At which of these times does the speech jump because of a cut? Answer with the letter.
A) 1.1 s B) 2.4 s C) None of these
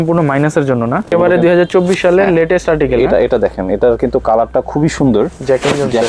A